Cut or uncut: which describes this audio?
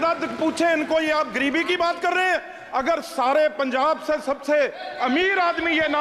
uncut